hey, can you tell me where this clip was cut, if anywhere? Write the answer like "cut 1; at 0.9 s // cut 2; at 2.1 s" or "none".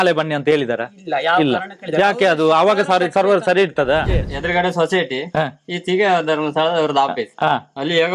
cut 1; at 4.3 s